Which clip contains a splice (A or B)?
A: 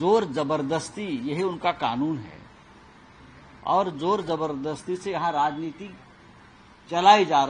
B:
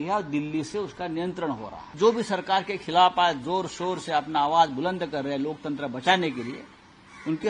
B